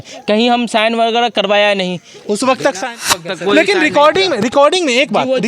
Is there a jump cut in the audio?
yes; 1 cut; at 3.1 s

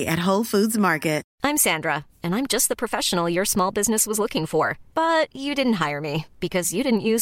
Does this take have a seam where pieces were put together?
yes; 1 cut; at 1.3 s

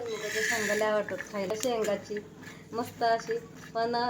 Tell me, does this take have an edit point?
yes; 1 cut; at 1.5 s

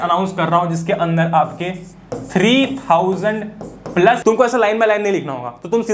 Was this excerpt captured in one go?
no; 1 cut; at 4.2 s

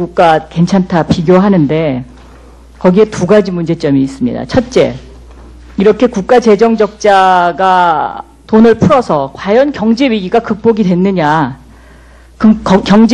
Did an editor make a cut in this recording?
yes; 1 cut; at 11.0 s

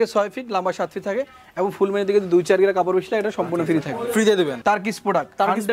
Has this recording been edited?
yes; 1 cut; at 4.5 s

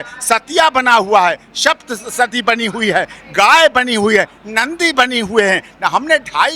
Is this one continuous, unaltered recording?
yes; 0 cuts

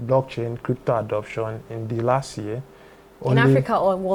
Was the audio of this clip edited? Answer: no; 0 cuts

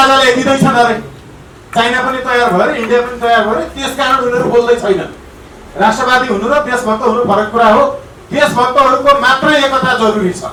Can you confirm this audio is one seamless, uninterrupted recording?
yes; 0 cuts

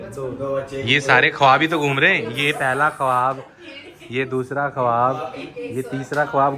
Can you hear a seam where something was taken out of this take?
no; 0 cuts

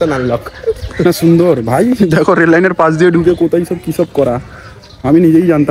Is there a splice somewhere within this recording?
no; 0 cuts

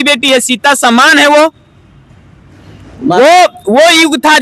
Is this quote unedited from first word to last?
yes; 0 cuts

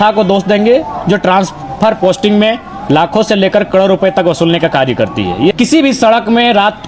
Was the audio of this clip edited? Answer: yes; 1 cut; at 5.5 s

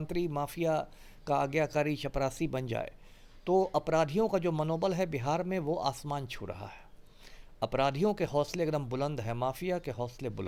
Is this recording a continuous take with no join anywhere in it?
yes; 0 cuts

